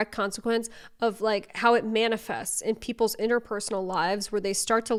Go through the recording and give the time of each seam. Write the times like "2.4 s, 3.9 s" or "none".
none